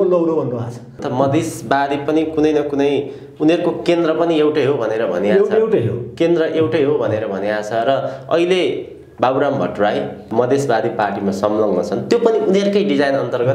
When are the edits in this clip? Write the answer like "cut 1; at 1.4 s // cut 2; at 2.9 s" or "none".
cut 1; at 1.0 s // cut 2; at 10.3 s